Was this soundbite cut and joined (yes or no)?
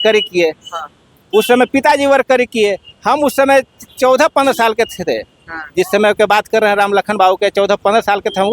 no